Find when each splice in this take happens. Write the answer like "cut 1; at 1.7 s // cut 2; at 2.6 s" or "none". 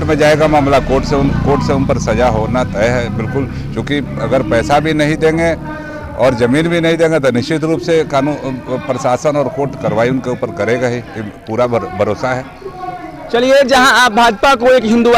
none